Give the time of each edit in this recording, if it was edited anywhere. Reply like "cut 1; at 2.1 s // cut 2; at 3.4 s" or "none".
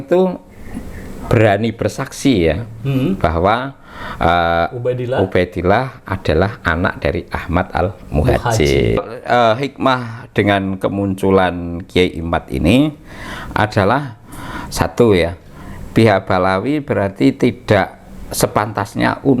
cut 1; at 9.1 s